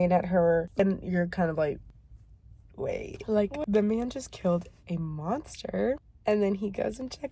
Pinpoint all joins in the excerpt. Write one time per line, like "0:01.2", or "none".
0:00.8
0:03.2